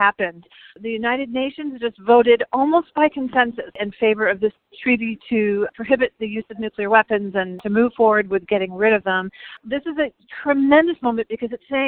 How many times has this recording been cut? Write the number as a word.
three